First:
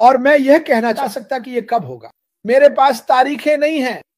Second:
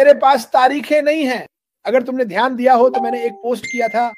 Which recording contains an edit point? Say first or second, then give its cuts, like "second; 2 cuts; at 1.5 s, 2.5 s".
first; 1 cut; at 1.0 s